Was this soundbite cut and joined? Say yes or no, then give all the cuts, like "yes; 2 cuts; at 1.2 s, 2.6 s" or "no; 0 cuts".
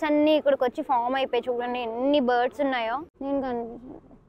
no; 0 cuts